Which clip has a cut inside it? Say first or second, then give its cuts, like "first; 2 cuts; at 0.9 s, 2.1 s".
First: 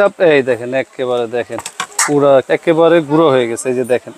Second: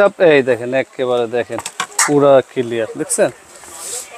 first; 1 cut; at 2.5 s